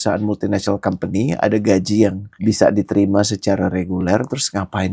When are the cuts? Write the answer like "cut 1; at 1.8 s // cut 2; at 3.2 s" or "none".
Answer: cut 1; at 2.3 s